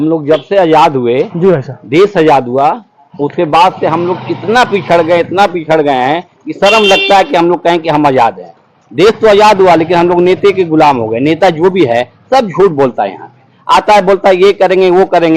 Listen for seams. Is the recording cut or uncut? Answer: uncut